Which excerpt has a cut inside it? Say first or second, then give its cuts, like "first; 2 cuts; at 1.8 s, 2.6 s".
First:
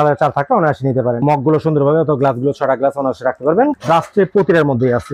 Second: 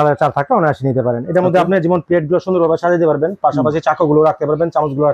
first; 2 cuts; at 1.2 s, 3.8 s